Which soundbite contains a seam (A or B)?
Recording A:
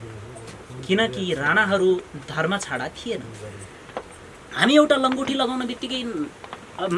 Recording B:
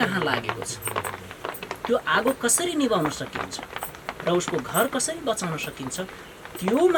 A